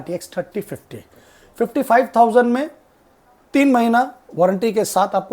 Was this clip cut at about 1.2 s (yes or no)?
no